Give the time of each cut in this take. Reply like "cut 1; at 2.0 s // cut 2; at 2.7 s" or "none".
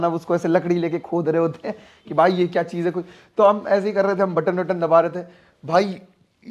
none

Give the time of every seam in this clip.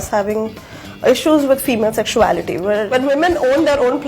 none

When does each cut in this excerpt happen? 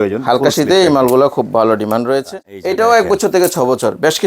cut 1; at 2.8 s

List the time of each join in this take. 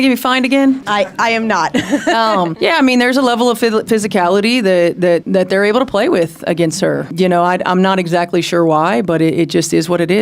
cut 1; at 7.1 s

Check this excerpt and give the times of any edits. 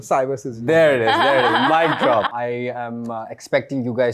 cut 1; at 2.3 s

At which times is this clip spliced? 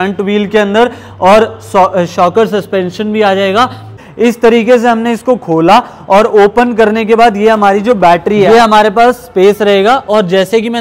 cut 1; at 4.0 s // cut 2; at 8.5 s

